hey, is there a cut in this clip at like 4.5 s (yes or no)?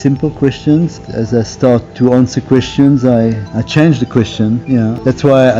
no